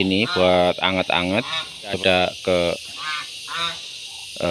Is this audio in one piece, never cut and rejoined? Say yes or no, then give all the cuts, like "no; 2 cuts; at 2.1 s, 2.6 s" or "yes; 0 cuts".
no; 1 cut; at 2.0 s